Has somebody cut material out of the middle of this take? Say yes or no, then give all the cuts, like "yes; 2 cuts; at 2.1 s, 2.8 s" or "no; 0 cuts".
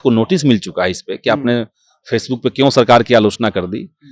no; 0 cuts